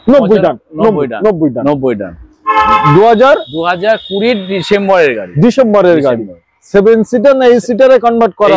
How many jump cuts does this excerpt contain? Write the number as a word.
zero